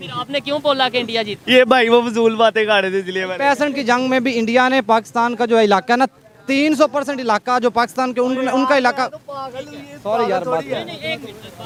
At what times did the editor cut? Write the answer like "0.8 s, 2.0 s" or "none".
none

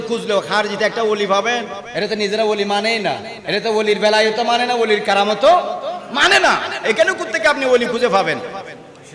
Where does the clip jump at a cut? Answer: 1.8 s, 3.3 s

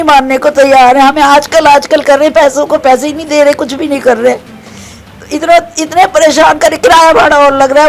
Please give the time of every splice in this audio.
none

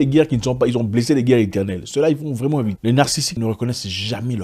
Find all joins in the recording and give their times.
2.8 s

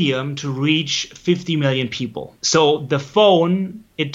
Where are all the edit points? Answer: 2.3 s

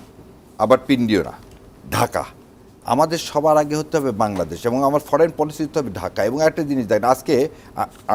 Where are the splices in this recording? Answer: none

